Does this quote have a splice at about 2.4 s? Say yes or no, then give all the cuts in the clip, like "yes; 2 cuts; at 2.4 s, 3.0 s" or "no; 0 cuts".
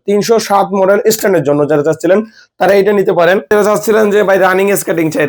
no; 0 cuts